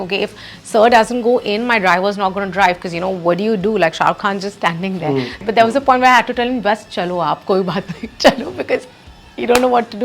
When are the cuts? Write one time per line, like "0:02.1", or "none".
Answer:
0:05.4